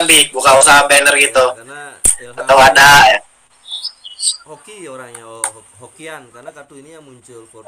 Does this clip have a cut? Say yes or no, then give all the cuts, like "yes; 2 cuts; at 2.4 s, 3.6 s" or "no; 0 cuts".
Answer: no; 0 cuts